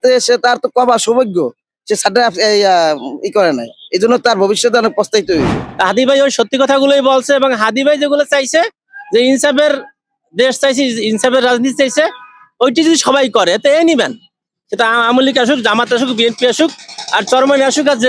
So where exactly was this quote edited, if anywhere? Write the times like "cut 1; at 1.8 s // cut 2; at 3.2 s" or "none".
cut 1; at 5.6 s